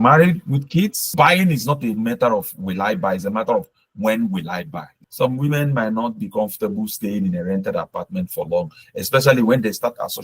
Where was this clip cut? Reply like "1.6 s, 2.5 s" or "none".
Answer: 1.1 s, 4.9 s